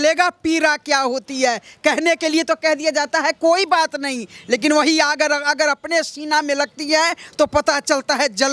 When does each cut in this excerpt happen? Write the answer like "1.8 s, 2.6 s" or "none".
none